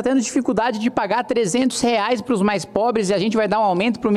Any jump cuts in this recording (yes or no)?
no